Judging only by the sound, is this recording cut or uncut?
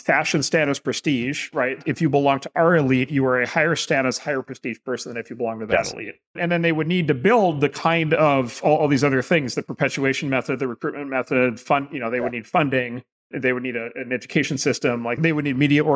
uncut